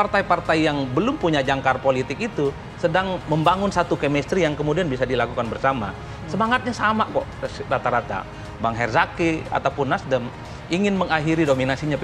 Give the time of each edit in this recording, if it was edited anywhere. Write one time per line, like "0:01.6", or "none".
none